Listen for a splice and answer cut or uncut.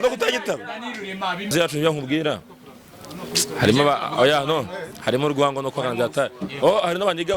cut